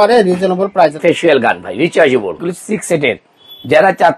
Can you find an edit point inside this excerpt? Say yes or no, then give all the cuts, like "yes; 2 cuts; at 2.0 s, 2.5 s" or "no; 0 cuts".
yes; 2 cuts; at 1.0 s, 2.4 s